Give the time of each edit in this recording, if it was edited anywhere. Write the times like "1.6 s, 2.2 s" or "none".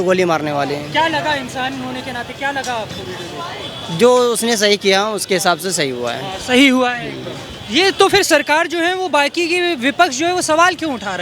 none

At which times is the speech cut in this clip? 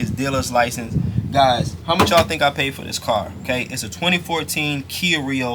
1.7 s

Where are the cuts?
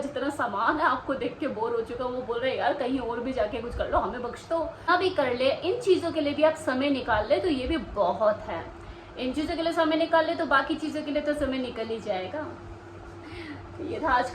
4.9 s

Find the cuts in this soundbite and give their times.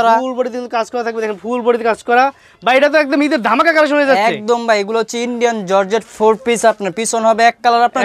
none

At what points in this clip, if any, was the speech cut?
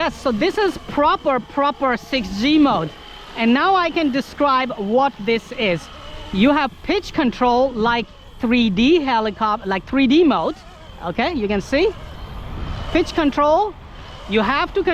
none

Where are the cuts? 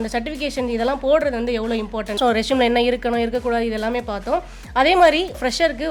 2.2 s

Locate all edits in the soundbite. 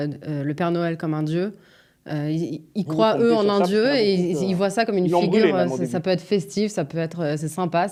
none

